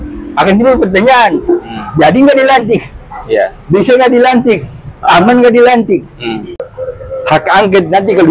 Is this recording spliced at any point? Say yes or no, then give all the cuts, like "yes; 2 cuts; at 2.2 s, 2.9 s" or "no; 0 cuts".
yes; 1 cut; at 6.6 s